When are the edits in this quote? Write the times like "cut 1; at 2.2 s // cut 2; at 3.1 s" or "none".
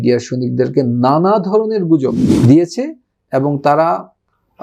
cut 1; at 2.3 s